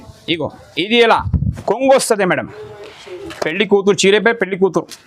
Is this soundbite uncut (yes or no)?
no